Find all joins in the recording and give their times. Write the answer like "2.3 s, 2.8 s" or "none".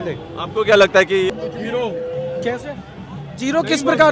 1.5 s